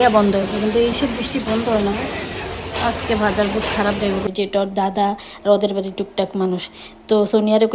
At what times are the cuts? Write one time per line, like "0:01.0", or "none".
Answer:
0:04.3